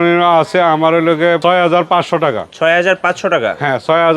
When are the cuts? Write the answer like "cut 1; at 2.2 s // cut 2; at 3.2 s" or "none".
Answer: cut 1; at 1.4 s // cut 2; at 2.5 s